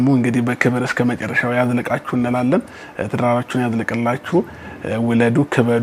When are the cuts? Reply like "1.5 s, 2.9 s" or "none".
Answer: none